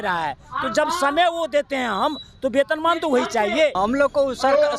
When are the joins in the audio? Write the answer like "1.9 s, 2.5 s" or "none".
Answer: 3.7 s

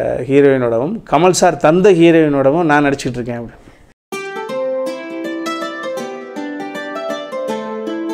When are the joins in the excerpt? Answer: none

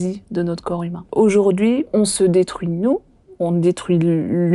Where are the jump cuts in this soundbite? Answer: 1.0 s, 1.9 s

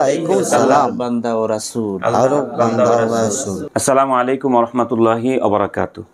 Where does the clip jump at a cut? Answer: 3.6 s

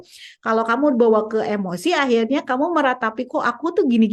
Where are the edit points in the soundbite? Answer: none

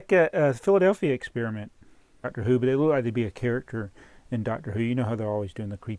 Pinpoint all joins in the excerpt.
2.3 s

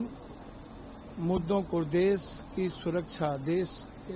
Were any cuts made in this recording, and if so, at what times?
none

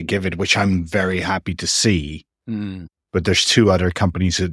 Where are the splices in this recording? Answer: 2.8 s

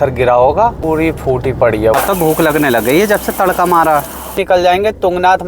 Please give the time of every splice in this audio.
0.8 s, 1.9 s, 4.4 s

